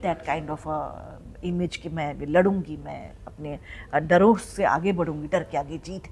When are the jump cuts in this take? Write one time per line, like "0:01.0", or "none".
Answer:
none